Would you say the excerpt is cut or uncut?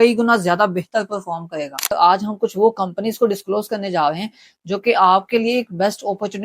cut